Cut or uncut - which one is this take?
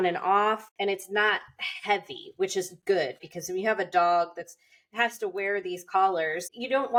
uncut